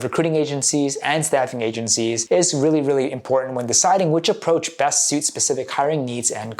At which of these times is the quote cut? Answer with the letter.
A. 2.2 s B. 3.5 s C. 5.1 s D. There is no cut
A